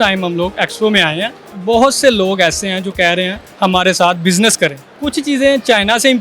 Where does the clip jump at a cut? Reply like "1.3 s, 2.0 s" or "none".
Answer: 1.5 s, 3.4 s, 4.9 s

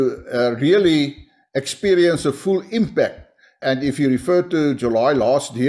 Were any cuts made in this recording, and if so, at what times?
3.6 s

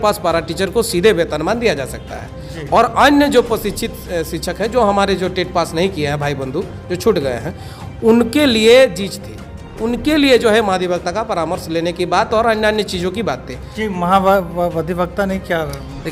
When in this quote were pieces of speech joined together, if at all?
none

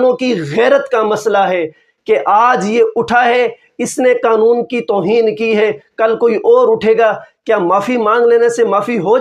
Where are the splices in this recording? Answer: none

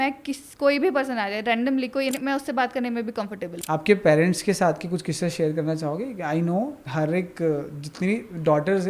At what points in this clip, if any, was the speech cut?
2.1 s, 3.6 s

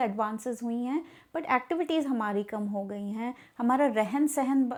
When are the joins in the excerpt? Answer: none

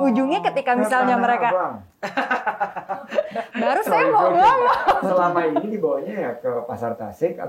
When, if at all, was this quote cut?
5.0 s

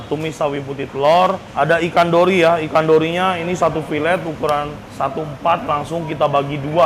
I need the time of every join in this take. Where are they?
1.4 s, 4.8 s

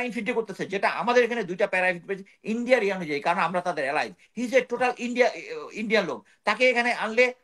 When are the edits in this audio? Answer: none

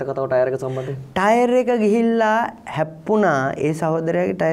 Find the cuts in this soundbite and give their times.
none

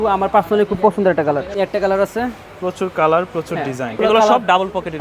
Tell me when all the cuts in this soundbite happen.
1.5 s, 3.9 s

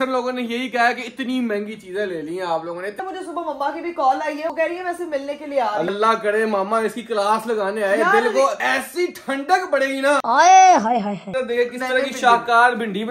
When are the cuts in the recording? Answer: 3.0 s, 4.5 s, 5.9 s, 11.2 s

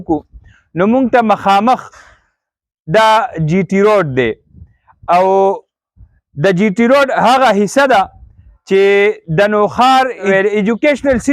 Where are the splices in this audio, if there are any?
10.3 s

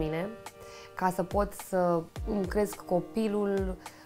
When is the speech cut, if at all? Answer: 2.1 s

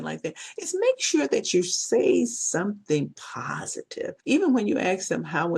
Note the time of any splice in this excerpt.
4.2 s

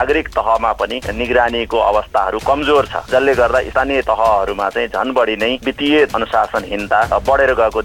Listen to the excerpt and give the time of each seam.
3.9 s, 5.7 s

